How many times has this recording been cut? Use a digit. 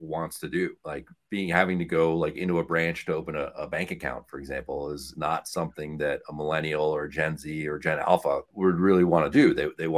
1